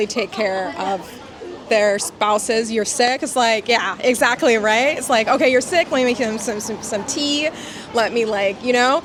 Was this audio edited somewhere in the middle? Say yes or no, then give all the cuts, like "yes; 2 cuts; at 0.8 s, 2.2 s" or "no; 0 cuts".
no; 0 cuts